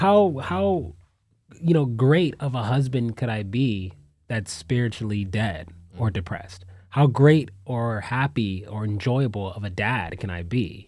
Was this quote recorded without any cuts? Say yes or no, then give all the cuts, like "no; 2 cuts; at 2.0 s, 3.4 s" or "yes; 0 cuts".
yes; 0 cuts